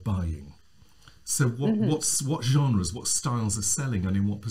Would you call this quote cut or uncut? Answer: uncut